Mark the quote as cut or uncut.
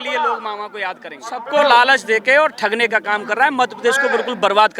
cut